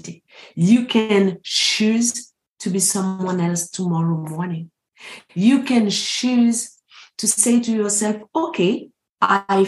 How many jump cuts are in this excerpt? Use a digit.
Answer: 0